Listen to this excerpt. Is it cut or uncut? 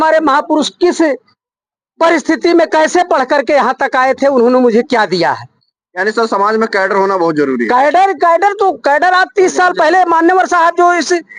uncut